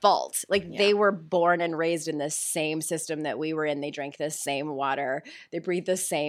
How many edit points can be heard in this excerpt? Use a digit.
0